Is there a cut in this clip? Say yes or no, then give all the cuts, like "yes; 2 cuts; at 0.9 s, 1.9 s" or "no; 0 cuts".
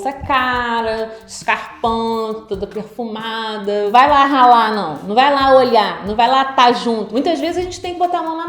yes; 2 cuts; at 3.9 s, 7.1 s